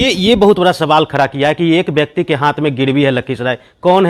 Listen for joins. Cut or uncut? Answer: uncut